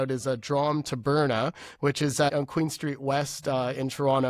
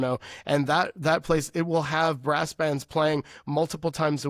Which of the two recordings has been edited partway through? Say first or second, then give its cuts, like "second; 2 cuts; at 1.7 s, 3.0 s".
first; 1 cut; at 2.3 s